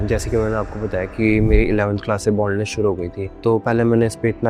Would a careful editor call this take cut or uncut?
uncut